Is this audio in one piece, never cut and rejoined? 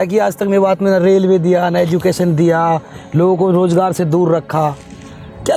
yes; 0 cuts

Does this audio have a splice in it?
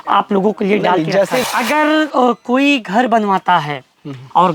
yes; 1 cut; at 1.4 s

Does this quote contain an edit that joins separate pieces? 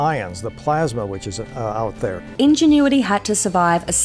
yes; 1 cut; at 2.7 s

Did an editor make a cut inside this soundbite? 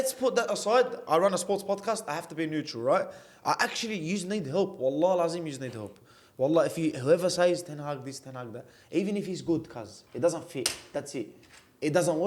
no; 0 cuts

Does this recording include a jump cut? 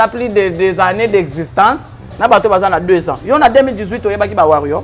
no; 0 cuts

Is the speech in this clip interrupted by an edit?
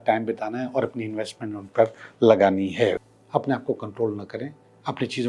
yes; 1 cut; at 3.0 s

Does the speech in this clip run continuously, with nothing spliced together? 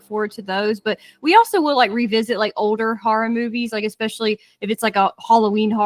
yes; 0 cuts

